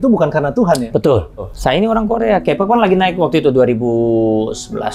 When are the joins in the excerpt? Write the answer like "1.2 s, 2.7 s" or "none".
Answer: 1.5 s